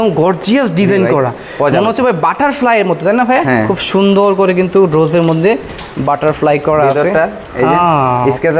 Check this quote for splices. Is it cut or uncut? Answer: uncut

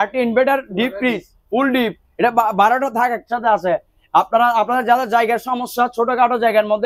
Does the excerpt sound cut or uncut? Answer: uncut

